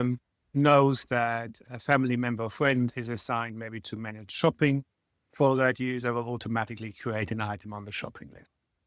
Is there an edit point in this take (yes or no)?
no